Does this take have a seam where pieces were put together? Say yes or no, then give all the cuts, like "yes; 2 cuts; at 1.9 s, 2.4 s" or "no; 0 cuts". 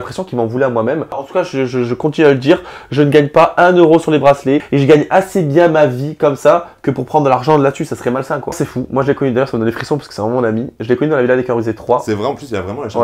yes; 3 cuts; at 1.2 s, 4.7 s, 8.6 s